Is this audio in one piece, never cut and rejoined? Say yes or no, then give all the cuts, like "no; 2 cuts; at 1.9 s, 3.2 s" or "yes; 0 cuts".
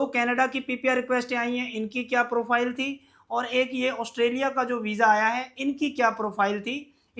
yes; 0 cuts